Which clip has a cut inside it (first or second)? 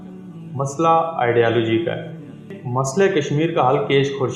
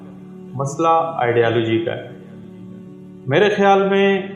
first